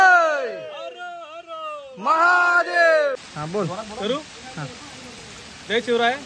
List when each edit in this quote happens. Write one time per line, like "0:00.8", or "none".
0:03.2

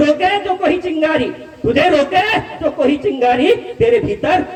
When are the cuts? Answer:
none

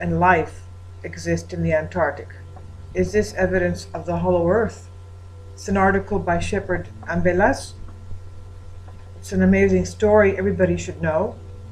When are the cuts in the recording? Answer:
0:01.4

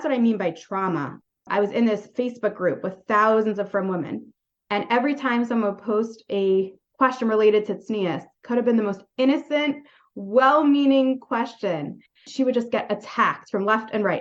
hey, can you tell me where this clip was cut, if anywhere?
0:01.4

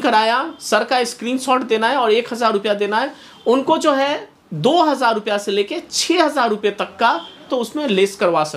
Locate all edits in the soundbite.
0:07.4

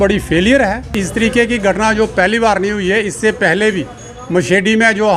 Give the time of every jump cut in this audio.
0:00.9

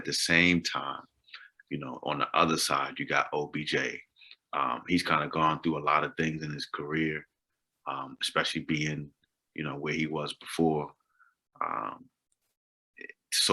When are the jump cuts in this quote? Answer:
none

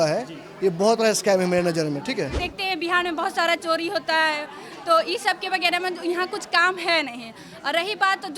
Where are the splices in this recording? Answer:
0:02.5

